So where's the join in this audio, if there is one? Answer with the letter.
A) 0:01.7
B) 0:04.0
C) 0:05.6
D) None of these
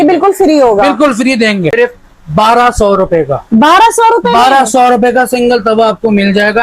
A